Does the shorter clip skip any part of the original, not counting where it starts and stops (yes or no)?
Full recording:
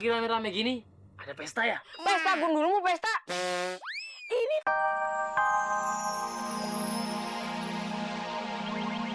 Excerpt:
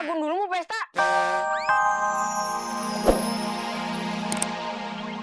yes